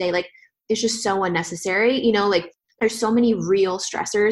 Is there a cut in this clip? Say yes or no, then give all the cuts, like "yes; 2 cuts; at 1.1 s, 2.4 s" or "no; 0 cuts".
yes; 1 cut; at 2.6 s